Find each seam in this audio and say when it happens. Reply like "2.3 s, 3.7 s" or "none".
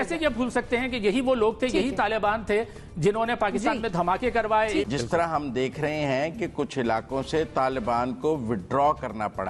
4.9 s